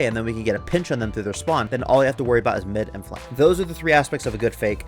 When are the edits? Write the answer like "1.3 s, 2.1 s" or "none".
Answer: 1.7 s